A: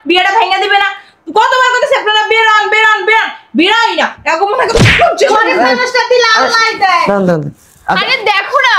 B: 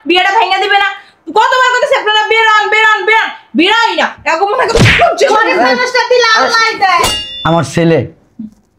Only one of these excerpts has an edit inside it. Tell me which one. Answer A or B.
B